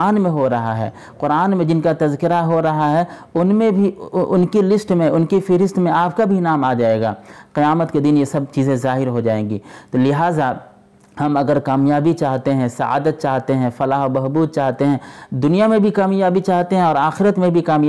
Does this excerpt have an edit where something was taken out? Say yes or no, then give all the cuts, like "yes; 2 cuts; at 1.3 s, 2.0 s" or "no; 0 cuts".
no; 0 cuts